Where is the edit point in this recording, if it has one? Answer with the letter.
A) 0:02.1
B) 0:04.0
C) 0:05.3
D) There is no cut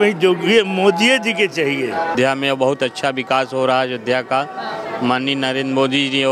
A